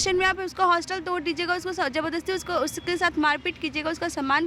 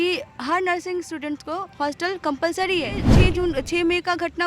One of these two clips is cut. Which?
second; 1 cut; at 3.1 s

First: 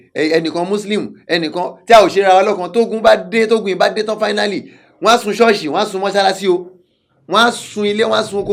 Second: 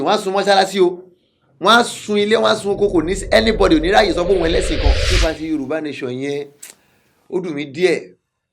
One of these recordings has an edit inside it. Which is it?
second; 1 cut; at 5.0 s

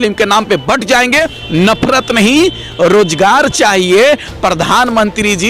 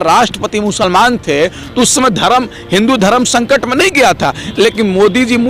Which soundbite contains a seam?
first; 1 cut; at 1.4 s

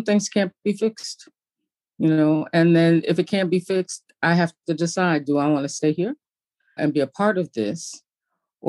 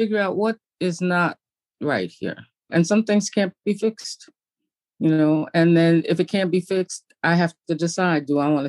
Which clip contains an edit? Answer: first; 1 cut; at 6.8 s

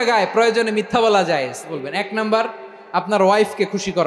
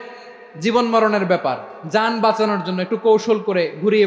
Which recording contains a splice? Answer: first; 1 cut; at 1.7 s

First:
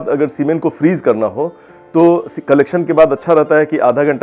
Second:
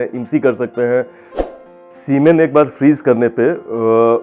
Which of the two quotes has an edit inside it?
second; 1 cut; at 1.3 s

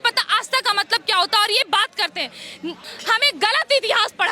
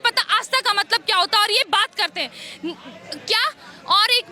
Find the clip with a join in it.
first; 1 cut; at 2.9 s

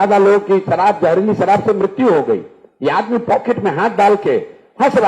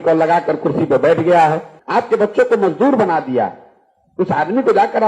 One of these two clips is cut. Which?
second; 1 cut; at 1.7 s

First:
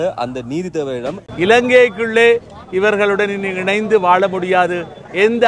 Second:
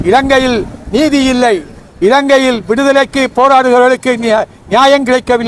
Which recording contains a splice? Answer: first; 1 cut; at 1.2 s

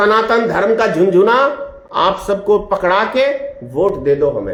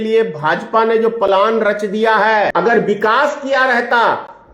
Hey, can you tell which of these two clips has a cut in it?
second; 1 cut; at 2.5 s

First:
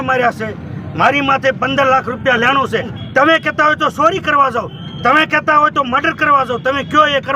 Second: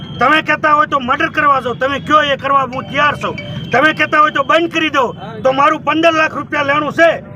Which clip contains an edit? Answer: first; 1 cut; at 3.0 s

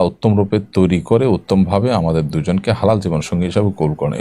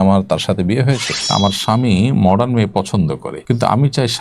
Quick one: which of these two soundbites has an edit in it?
second; 2 cuts; at 1.3 s, 3.3 s

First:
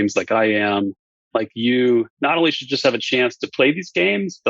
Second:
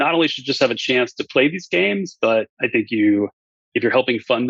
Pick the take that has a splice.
first; 1 cut; at 1.1 s

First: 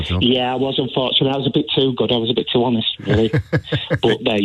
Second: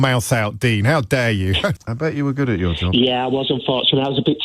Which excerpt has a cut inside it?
second; 1 cut; at 1.8 s

